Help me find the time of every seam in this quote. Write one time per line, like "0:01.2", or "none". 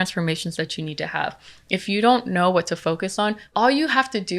0:03.5